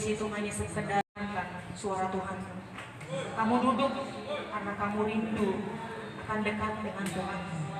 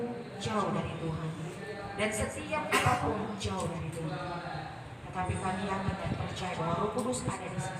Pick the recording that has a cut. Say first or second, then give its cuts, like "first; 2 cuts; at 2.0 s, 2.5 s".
first; 1 cut; at 1.1 s